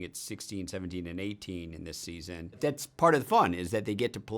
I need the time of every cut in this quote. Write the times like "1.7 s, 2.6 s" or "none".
2.6 s